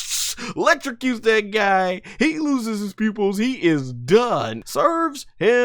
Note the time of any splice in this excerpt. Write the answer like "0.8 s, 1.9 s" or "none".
4.6 s